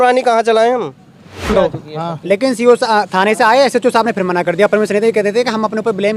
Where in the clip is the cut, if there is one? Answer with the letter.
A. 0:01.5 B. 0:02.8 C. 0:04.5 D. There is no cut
A